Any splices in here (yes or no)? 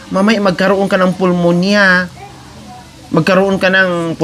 no